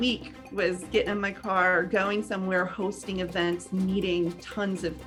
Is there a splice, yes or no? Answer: no